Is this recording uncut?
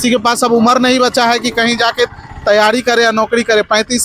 yes; 0 cuts

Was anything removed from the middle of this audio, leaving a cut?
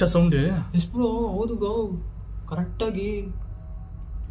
yes; 1 cut; at 3.4 s

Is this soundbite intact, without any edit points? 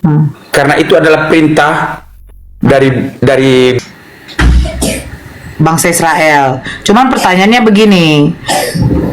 no; 1 cut; at 3.8 s

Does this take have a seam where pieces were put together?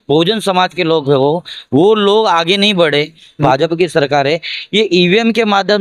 yes; 1 cut; at 3.4 s

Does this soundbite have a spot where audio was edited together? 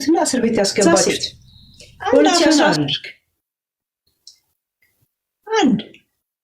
yes; 1 cut; at 2.5 s

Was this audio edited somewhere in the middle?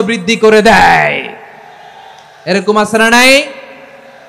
no; 0 cuts

